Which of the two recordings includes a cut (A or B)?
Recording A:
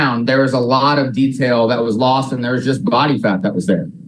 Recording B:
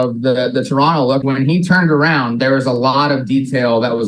B